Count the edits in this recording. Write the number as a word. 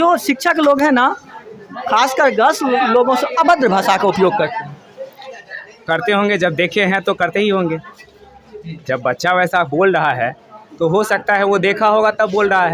zero